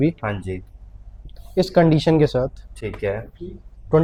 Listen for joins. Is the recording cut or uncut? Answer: uncut